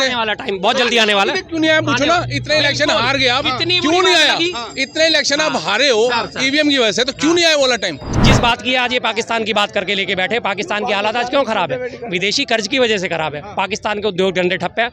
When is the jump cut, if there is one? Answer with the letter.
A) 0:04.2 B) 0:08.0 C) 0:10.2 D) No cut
B